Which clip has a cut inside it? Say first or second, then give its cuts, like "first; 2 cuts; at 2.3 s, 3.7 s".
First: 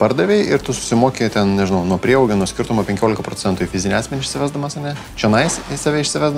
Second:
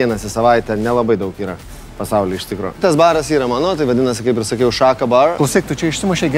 second; 2 cuts; at 2.8 s, 5.3 s